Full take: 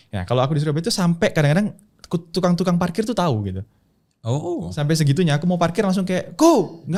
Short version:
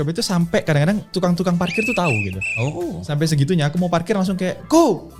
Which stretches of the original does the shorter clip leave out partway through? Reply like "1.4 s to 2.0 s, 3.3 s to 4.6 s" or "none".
1.8 s to 2.3 s, 3.6 s to 4.1 s

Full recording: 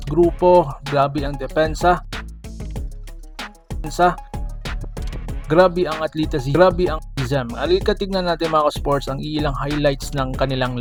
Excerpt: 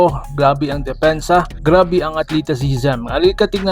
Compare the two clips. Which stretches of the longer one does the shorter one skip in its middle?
2.1 s to 5.4 s, 6.5 s to 7.1 s

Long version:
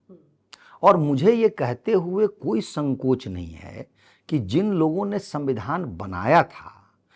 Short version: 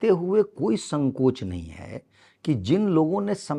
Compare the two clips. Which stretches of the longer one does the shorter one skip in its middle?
none

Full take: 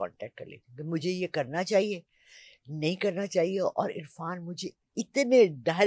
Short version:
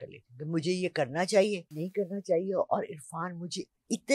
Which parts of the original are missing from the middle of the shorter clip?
2.1 s to 2.8 s

